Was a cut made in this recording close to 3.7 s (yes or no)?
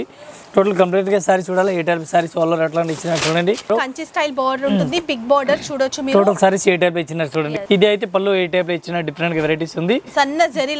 yes